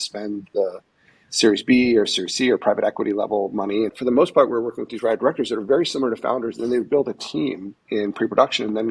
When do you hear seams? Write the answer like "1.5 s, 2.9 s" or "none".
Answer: 3.9 s, 7.7 s